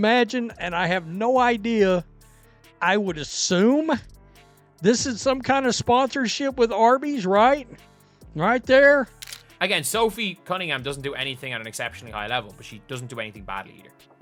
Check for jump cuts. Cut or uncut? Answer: uncut